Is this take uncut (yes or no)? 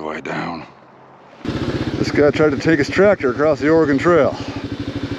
no